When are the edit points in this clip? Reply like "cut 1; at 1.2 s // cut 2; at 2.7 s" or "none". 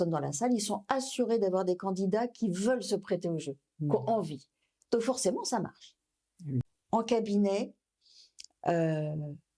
cut 1; at 6.7 s